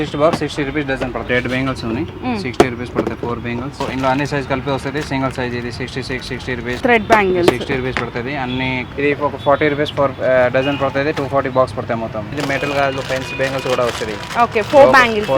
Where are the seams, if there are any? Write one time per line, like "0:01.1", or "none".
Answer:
0:01.2
0:03.8
0:06.8
0:08.8
0:12.3